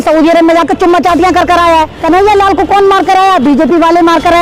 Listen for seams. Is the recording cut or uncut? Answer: cut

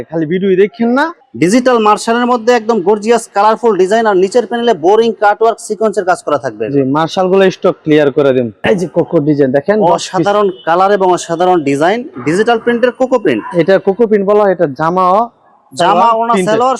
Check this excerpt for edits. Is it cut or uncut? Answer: cut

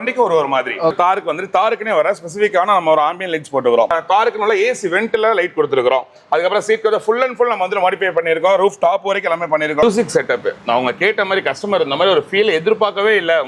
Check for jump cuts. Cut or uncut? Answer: cut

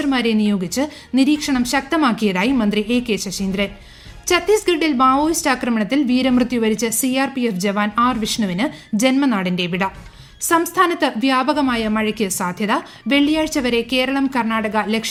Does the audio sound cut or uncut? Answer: uncut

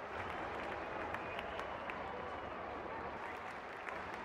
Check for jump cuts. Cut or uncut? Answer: uncut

